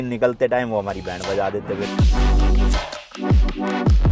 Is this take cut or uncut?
uncut